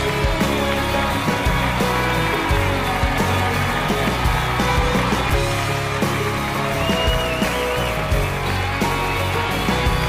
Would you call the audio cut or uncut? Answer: uncut